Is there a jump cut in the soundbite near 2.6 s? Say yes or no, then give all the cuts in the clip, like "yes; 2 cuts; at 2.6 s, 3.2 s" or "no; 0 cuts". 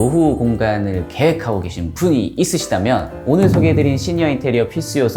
no; 0 cuts